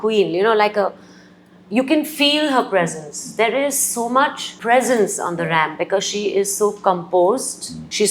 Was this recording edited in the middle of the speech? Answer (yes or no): no